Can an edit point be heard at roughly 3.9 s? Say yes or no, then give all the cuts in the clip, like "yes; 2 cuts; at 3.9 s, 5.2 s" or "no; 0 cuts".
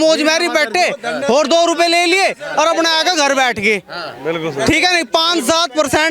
no; 0 cuts